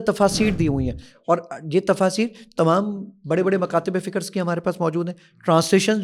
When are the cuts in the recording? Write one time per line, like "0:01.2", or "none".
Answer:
none